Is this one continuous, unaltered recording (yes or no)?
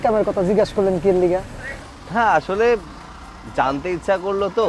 yes